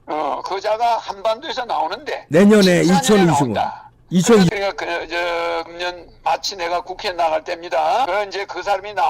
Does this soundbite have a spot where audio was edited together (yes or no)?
yes